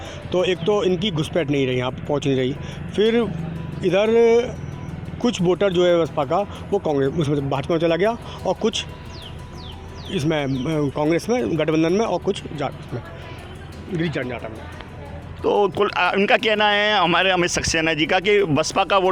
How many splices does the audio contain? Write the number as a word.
zero